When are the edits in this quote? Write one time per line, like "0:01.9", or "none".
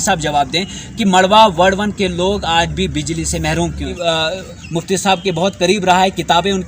0:04.0